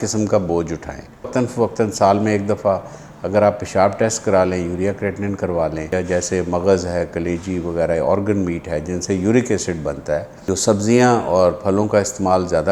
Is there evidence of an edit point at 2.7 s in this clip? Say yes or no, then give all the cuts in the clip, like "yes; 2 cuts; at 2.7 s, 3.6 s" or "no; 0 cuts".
no; 3 cuts; at 1.3 s, 5.9 s, 10.3 s